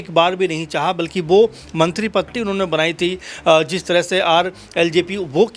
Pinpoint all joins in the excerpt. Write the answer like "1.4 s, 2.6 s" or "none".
2.3 s